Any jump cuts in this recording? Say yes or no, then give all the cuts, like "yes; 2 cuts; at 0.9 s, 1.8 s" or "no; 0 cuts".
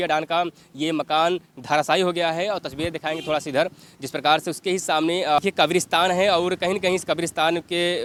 no; 0 cuts